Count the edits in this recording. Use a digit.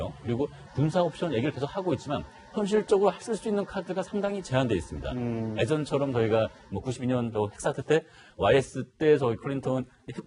1